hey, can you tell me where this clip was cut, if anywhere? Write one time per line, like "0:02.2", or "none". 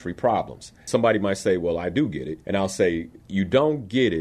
0:00.8
0:02.3
0:03.2